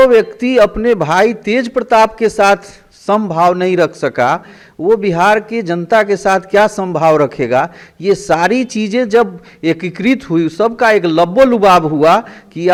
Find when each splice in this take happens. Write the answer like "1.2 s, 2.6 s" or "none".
none